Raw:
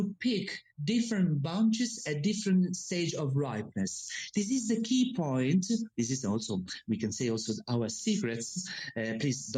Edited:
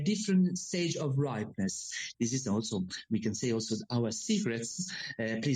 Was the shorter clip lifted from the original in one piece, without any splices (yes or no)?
no